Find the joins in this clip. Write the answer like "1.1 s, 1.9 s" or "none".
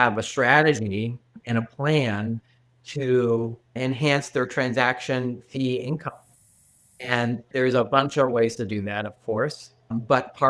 3.8 s, 7.5 s